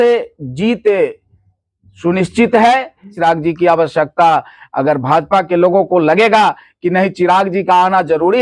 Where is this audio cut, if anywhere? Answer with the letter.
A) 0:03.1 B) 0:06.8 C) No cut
A